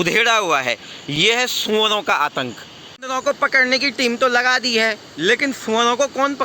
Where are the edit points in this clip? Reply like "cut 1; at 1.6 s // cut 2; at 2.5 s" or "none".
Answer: cut 1; at 2.9 s